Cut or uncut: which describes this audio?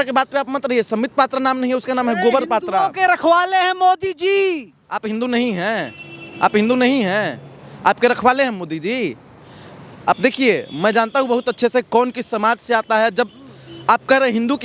uncut